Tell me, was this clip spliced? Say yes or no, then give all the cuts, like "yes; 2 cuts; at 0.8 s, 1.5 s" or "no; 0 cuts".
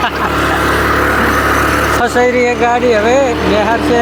no; 0 cuts